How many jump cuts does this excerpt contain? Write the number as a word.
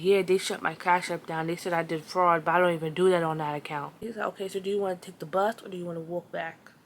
one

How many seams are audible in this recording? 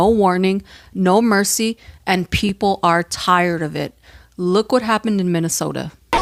zero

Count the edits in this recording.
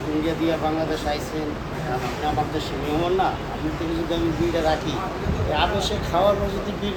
zero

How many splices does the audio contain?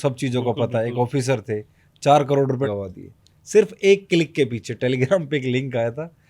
one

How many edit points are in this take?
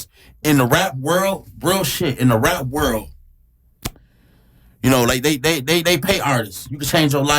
zero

